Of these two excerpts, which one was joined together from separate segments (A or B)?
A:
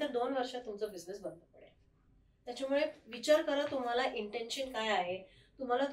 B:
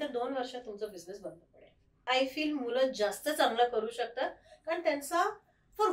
B